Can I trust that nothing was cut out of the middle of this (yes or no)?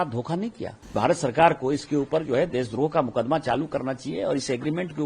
no